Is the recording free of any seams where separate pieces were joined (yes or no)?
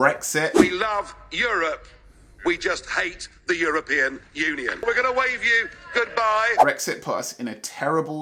yes